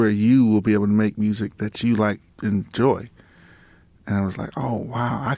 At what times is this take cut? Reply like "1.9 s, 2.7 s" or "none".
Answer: 2.3 s